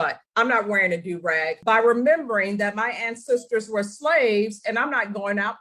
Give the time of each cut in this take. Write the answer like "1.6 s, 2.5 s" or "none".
1.6 s